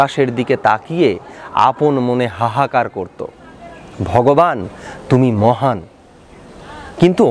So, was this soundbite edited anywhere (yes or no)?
no